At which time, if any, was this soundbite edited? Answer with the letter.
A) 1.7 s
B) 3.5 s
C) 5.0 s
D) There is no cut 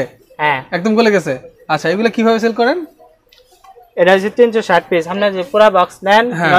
D